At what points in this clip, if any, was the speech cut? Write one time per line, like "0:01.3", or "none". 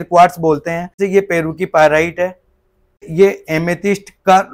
0:01.0
0:03.1